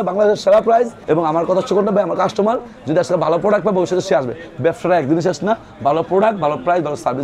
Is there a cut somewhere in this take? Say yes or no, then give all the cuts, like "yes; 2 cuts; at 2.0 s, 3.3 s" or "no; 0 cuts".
yes; 1 cut; at 1.0 s